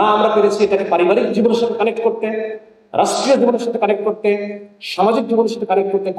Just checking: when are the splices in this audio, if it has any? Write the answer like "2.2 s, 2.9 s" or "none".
none